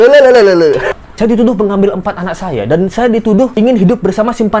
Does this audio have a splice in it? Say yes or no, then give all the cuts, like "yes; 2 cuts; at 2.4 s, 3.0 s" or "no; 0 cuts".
yes; 1 cut; at 1.0 s